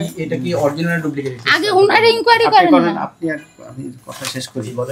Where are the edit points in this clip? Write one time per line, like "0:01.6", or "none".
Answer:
none